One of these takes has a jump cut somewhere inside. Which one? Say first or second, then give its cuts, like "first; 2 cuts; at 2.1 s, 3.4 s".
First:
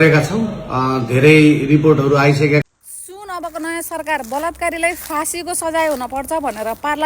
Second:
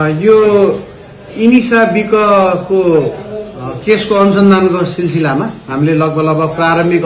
first; 1 cut; at 2.6 s